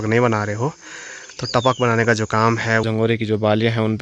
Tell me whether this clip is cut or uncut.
cut